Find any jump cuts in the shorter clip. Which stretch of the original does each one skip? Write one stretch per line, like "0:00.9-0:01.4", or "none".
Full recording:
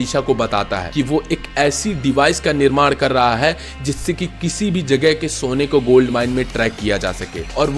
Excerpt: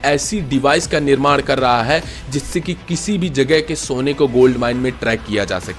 none